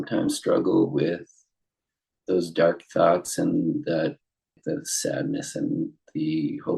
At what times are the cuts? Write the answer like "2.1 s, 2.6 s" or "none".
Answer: 4.6 s